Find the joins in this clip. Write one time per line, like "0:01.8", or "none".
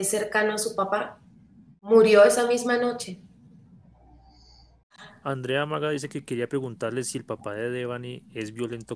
0:01.9
0:05.0